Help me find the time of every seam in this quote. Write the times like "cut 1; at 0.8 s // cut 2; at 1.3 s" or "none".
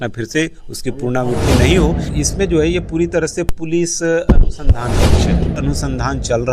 cut 1; at 2.2 s // cut 2; at 5.6 s